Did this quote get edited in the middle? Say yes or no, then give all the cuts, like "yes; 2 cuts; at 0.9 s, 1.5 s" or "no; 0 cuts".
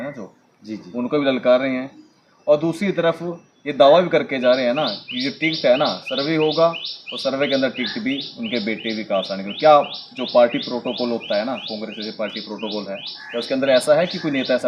no; 0 cuts